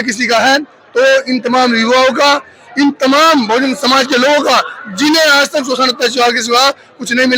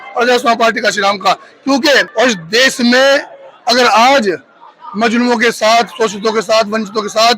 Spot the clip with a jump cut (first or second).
second